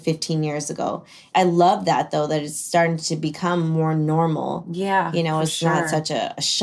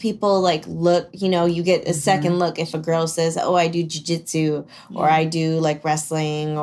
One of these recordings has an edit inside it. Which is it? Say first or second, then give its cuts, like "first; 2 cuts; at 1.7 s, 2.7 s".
first; 1 cut; at 1.3 s